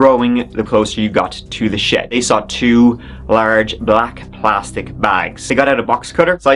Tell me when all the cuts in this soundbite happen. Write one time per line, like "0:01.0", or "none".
0:02.1
0:05.4